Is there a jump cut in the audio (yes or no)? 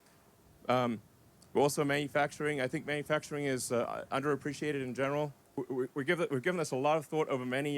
yes